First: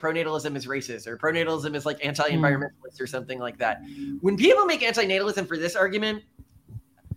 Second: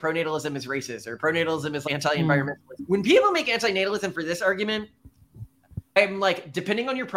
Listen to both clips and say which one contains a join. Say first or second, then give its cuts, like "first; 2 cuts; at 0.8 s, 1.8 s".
second; 3 cuts; at 1.8 s, 2.7 s, 6.0 s